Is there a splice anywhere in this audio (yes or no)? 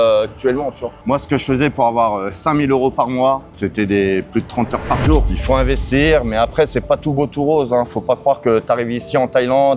yes